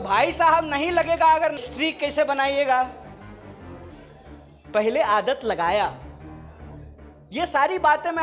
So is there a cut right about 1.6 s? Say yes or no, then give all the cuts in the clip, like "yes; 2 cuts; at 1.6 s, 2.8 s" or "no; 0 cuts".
yes; 1 cut; at 1.6 s